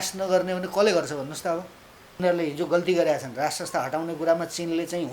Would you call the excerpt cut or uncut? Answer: cut